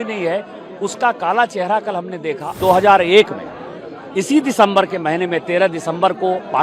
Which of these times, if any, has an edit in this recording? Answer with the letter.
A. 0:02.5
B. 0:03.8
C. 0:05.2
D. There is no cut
A